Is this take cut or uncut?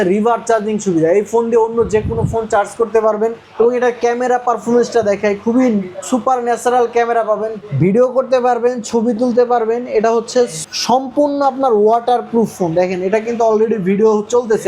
cut